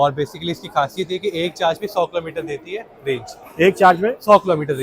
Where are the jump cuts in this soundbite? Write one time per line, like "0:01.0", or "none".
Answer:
none